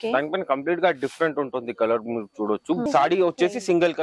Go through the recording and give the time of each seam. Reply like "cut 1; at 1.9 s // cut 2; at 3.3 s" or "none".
cut 1; at 2.8 s